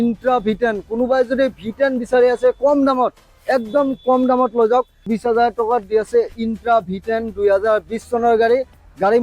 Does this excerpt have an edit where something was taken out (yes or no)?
yes